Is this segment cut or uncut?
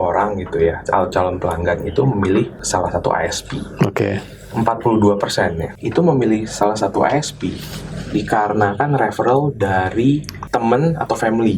cut